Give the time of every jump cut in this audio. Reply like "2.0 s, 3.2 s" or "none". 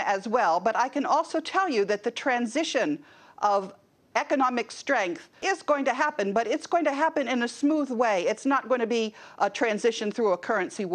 5.3 s